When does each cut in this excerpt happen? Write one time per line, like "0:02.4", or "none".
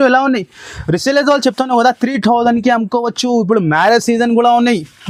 none